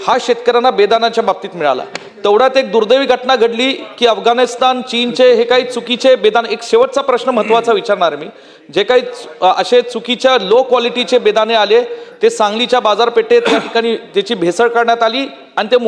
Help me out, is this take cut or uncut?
uncut